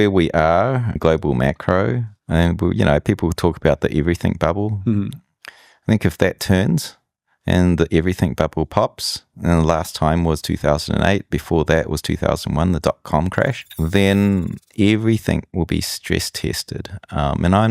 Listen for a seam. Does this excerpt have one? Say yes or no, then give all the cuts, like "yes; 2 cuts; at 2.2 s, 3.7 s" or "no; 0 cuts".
yes; 3 cuts; at 1.0 s, 2.1 s, 13.7 s